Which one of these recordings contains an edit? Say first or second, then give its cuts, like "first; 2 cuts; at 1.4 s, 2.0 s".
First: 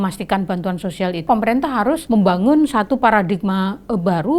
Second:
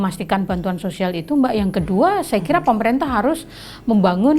first; 2 cuts; at 1.2 s, 2.0 s